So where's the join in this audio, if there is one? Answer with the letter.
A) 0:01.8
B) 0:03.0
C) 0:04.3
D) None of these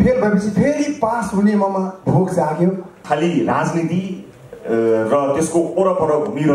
B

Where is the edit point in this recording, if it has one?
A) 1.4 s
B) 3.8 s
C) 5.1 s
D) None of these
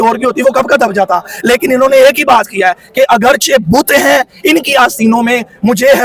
D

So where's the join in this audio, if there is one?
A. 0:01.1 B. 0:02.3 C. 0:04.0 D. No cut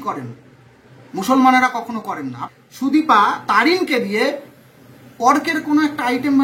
B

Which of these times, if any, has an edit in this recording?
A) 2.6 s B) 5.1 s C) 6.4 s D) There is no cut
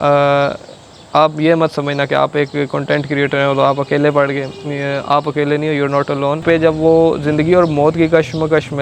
C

